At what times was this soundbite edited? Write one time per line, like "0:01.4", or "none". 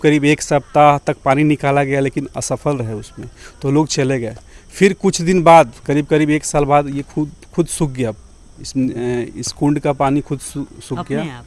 none